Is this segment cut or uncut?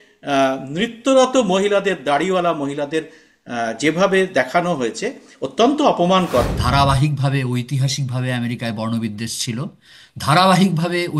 cut